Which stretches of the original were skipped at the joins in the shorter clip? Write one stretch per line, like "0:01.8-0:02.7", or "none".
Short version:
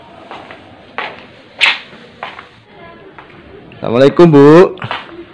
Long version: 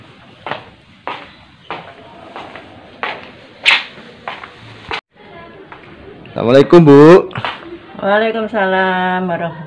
0:04.7-0:05.2